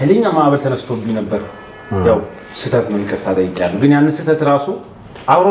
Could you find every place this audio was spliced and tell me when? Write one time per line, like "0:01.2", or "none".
none